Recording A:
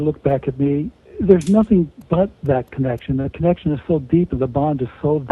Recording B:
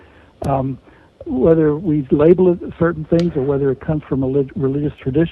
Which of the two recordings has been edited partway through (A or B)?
A